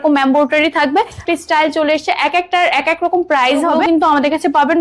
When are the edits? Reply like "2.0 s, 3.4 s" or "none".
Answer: 1.2 s, 3.8 s